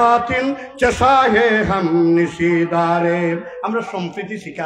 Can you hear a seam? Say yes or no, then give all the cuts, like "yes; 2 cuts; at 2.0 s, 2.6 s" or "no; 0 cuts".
no; 0 cuts